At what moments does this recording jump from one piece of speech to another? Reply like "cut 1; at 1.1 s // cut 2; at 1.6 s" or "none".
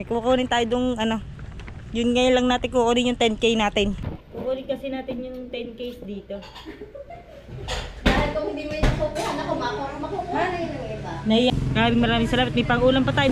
cut 1; at 4.2 s // cut 2; at 11.5 s